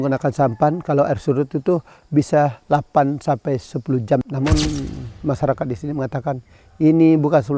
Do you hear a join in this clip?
yes; 1 cut; at 4.3 s

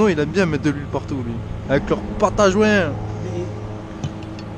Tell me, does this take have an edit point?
yes; 1 cut; at 1.6 s

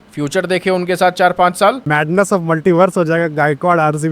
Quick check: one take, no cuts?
no; 1 cut; at 1.9 s

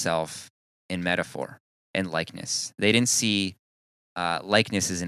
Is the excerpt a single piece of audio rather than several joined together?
no; 1 cut; at 1.7 s

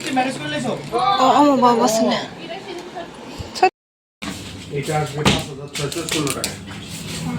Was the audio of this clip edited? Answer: yes; 1 cut; at 3.8 s

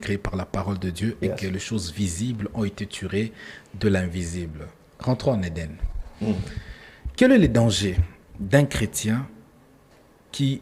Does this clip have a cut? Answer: no; 0 cuts

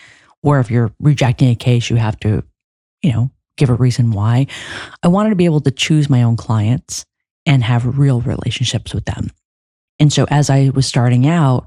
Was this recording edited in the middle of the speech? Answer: no; 0 cuts

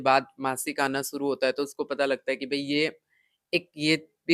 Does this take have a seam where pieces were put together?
no; 0 cuts

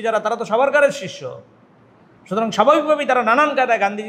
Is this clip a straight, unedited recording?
yes; 0 cuts

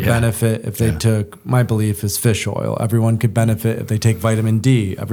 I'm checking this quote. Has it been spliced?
no; 0 cuts

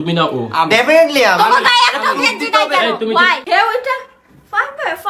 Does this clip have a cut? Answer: yes; 1 cut; at 3.4 s

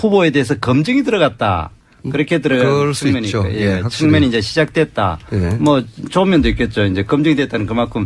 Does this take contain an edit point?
no; 0 cuts

